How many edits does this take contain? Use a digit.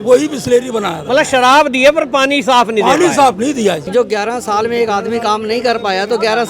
1